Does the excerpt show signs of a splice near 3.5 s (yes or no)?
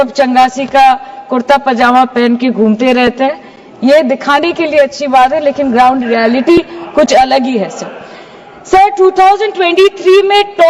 no